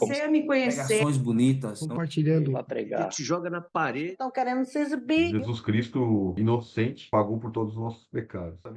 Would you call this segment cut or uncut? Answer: uncut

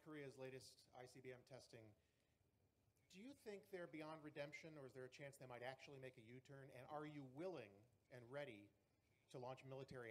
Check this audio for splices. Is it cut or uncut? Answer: cut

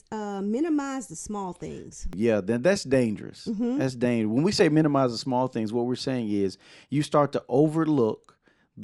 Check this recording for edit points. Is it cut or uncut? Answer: cut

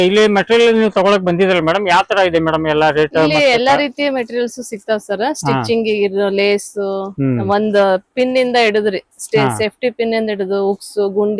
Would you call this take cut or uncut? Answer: uncut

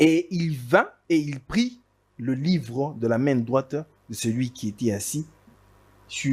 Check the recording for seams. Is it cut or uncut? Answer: cut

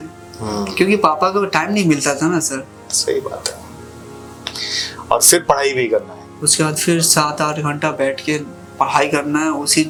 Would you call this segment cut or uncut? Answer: uncut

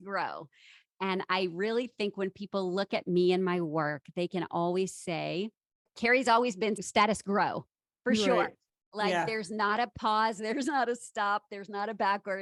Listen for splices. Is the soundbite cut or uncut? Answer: uncut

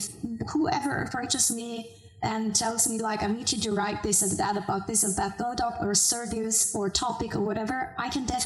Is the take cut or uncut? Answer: uncut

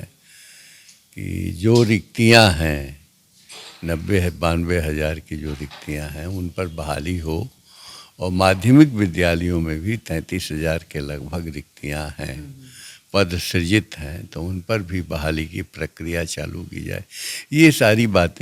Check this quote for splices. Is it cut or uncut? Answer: uncut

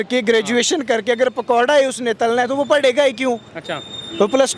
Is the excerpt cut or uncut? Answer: uncut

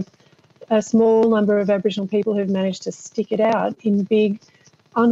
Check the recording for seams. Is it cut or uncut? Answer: uncut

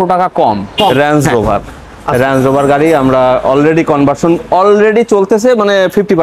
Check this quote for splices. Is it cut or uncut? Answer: cut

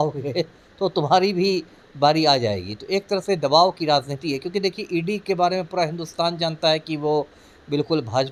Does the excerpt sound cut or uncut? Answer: uncut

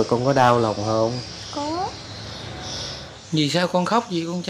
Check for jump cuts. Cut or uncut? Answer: cut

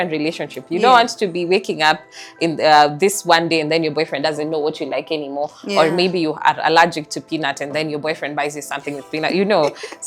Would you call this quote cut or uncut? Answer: uncut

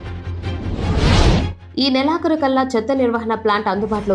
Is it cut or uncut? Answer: uncut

